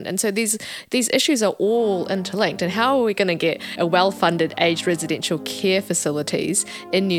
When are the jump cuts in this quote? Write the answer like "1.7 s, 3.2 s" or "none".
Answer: none